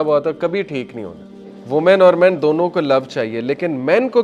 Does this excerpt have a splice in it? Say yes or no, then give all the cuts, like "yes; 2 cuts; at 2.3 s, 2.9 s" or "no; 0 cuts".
yes; 1 cut; at 1.5 s